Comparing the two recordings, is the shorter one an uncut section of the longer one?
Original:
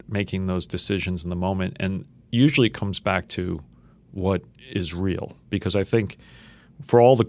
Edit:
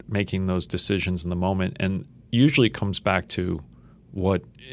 yes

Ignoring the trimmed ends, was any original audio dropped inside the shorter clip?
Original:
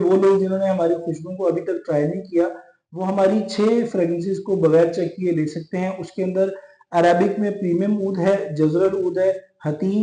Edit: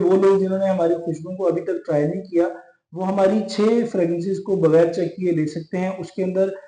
no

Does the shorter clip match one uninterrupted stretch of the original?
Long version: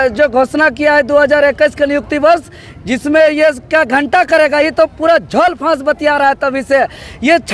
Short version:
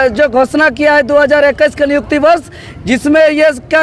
yes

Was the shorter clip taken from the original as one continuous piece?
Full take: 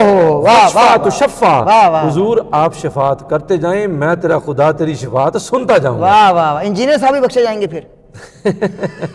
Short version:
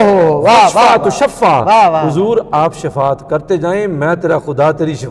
yes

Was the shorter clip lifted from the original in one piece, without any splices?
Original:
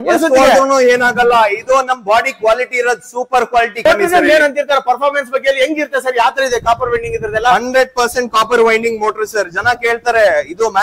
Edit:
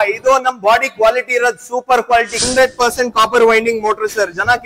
no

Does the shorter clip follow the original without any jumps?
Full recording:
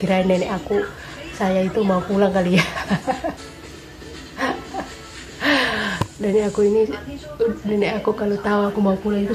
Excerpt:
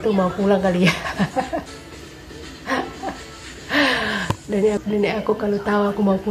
no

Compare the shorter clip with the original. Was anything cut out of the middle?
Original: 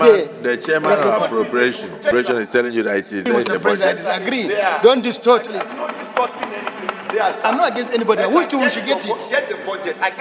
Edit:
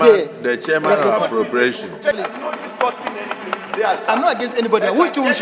yes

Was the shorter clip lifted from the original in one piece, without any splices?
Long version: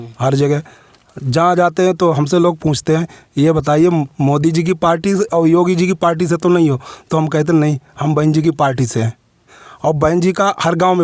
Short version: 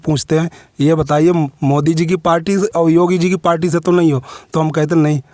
yes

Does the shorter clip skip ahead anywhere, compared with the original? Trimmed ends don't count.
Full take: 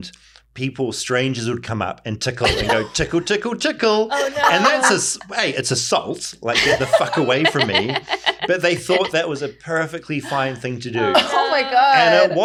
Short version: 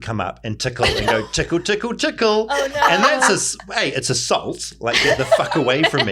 no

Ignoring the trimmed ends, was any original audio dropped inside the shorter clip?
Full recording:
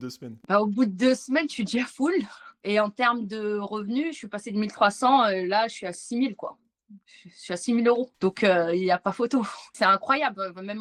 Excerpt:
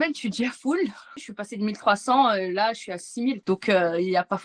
yes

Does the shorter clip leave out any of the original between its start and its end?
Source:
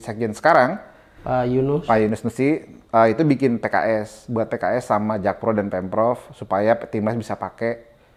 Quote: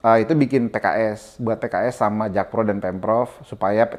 no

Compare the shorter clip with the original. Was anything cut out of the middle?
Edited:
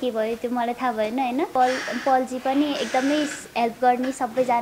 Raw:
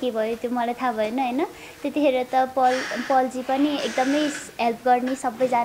yes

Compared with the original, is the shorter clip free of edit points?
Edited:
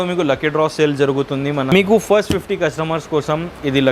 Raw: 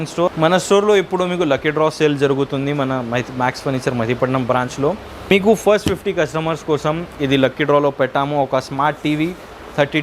no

